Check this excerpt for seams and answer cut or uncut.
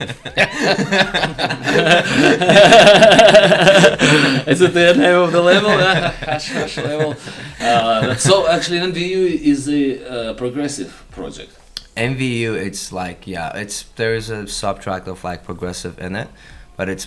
uncut